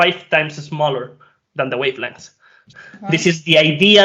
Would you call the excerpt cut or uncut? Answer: cut